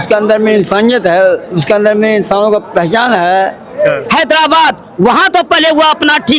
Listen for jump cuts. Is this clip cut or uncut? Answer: cut